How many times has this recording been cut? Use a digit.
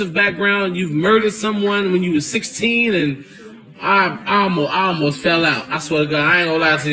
0